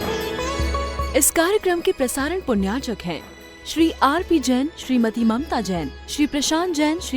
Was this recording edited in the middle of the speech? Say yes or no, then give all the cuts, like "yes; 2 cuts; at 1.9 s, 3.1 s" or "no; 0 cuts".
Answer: yes; 1 cut; at 1.0 s